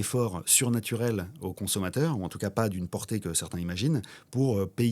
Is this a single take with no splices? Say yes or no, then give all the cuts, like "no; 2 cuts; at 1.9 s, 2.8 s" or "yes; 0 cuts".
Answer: yes; 0 cuts